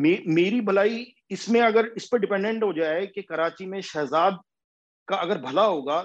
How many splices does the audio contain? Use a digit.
0